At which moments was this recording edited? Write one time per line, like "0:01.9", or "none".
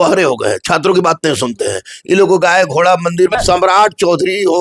0:03.3